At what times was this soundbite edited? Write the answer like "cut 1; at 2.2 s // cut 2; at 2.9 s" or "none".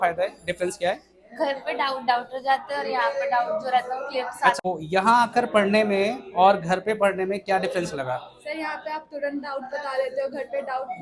cut 1; at 4.6 s